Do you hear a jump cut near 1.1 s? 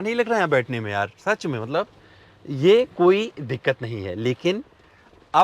no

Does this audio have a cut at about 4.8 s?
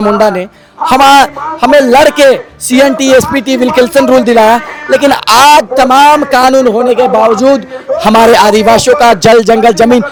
no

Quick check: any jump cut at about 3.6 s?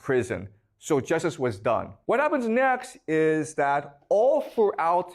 no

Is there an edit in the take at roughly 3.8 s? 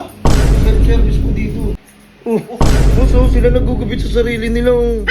no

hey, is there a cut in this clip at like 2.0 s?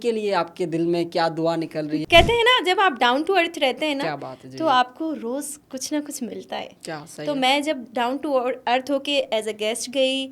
yes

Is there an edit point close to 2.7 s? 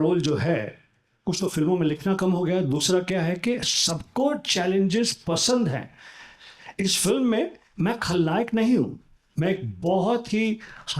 no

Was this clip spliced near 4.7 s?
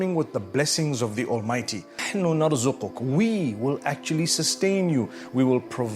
no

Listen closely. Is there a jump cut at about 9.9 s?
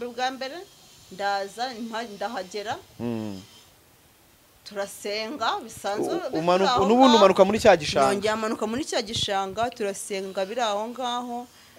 no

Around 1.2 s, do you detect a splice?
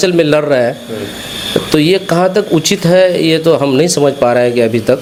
no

